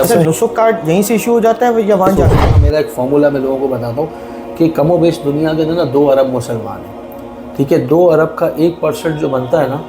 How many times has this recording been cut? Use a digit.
1